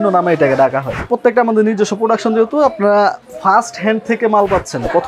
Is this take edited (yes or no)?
yes